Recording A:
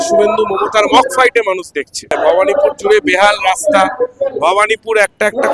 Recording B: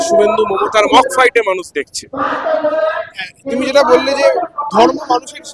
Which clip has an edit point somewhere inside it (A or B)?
A